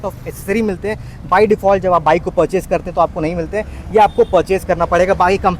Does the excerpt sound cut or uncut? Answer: uncut